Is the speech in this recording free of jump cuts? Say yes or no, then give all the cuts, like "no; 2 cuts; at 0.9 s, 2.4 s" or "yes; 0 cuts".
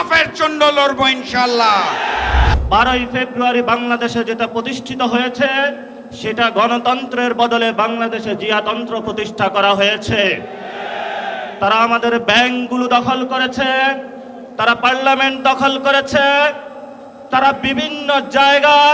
no; 1 cut; at 2.5 s